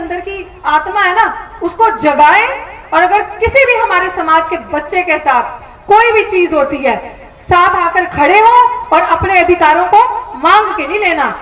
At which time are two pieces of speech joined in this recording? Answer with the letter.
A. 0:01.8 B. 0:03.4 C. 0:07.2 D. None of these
D